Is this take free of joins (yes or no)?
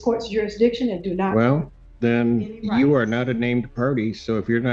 yes